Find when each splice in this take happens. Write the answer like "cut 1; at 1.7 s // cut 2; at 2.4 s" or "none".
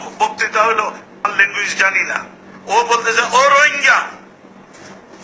cut 1; at 1.2 s